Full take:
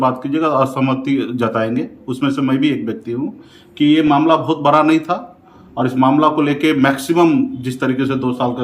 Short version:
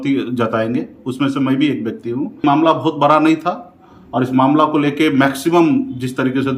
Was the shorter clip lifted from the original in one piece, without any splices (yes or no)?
no